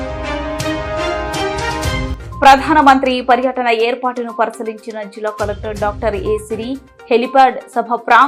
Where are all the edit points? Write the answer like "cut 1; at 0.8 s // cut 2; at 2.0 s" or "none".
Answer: cut 1; at 2.1 s